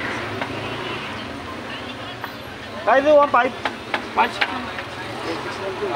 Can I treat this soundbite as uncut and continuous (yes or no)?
yes